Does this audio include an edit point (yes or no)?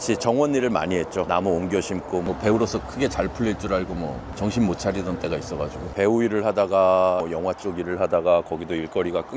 yes